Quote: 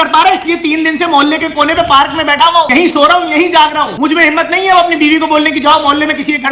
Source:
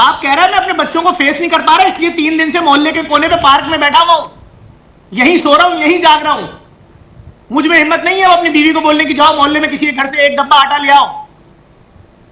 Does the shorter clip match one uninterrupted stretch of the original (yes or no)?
no